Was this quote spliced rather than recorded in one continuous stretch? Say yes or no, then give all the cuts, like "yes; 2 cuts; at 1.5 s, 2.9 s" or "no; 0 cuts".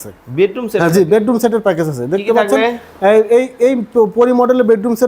no; 0 cuts